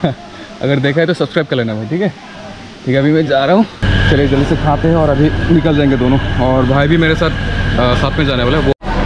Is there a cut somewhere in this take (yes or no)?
yes